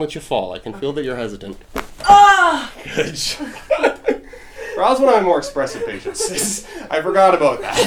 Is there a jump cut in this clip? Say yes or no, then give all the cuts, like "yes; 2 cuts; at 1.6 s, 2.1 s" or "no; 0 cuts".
no; 0 cuts